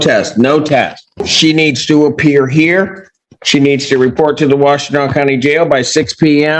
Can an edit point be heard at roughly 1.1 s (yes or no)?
yes